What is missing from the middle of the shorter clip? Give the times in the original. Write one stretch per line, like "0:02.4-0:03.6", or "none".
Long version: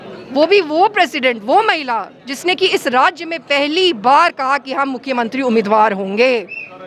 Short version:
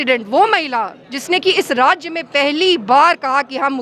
none